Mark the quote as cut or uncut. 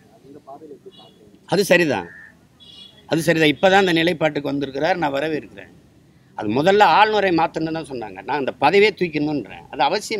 uncut